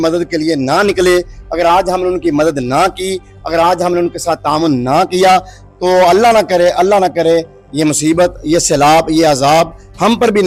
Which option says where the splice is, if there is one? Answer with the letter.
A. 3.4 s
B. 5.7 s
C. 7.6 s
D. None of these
D